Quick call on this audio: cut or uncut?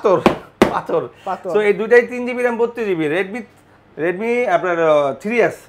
uncut